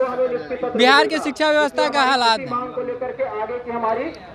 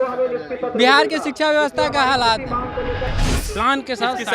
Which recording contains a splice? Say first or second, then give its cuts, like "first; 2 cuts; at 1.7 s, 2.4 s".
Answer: second; 1 cut; at 3.1 s